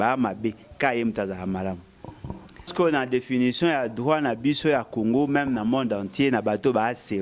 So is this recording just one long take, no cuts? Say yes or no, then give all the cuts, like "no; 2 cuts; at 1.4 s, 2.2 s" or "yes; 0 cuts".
no; 1 cut; at 2.7 s